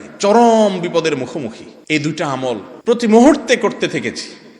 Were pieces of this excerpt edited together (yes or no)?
yes